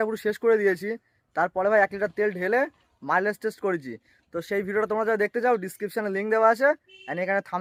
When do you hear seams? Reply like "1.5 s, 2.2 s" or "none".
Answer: none